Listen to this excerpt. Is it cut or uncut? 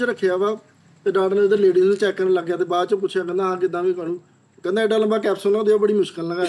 uncut